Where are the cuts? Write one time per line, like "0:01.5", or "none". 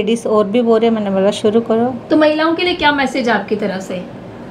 0:02.0

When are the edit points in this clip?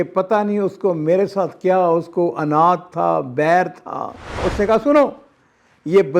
0:04.5

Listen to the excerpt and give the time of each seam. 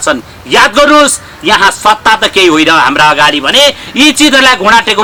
none

